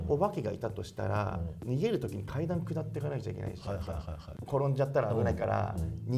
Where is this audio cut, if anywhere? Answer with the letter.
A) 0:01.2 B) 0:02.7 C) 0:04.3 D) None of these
C